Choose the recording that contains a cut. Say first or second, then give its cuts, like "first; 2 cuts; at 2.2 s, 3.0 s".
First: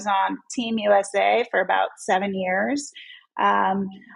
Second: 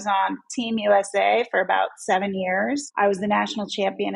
second; 1 cut; at 2.9 s